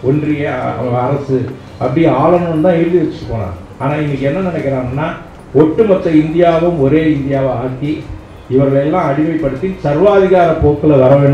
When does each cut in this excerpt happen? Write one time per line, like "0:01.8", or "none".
none